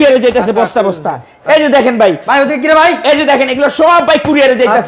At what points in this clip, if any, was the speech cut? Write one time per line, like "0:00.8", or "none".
none